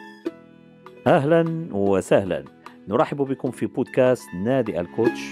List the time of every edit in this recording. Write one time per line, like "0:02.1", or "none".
0:01.0